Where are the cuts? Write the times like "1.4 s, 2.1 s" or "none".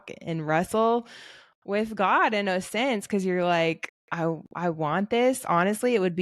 none